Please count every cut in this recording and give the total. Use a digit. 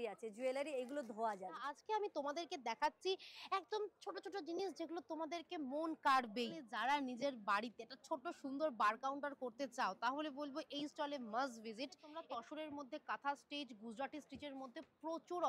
3